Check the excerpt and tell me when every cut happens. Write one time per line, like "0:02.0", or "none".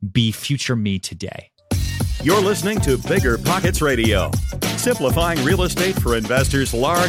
0:01.5